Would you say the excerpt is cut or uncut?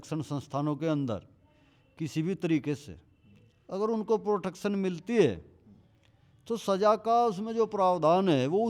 uncut